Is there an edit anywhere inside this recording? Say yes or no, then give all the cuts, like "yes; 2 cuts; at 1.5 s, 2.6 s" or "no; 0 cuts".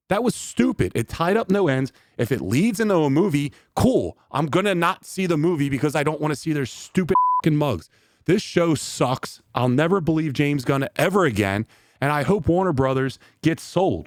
no; 0 cuts